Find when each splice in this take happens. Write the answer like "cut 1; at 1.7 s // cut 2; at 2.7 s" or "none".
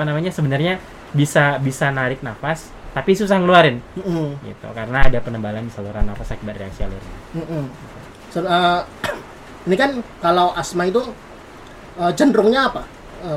none